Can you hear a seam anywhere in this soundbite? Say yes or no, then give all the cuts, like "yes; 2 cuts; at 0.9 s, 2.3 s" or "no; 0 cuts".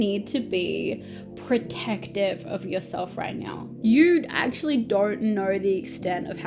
yes; 1 cut; at 3.7 s